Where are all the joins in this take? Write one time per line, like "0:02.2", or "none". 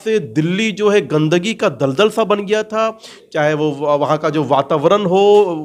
none